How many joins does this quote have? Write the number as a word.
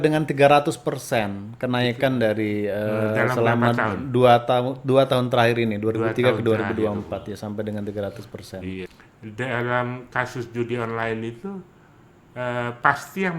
one